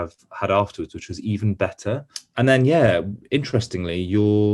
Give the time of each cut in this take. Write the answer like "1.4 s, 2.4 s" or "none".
2.2 s